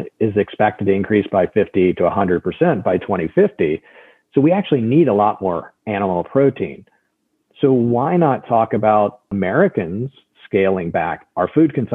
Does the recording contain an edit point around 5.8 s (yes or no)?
no